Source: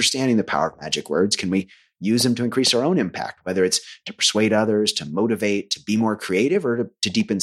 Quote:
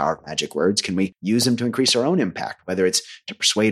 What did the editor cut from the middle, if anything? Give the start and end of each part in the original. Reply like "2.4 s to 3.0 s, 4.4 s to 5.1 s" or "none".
1.7 s to 1.9 s